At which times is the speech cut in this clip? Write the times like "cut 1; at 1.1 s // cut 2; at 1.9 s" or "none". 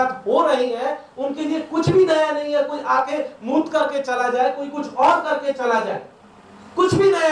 none